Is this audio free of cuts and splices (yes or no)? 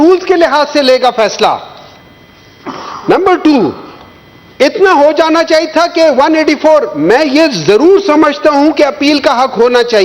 yes